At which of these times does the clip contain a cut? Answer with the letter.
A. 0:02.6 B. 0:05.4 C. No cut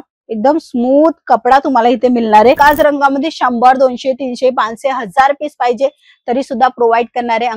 A